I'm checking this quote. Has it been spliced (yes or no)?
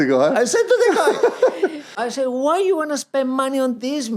yes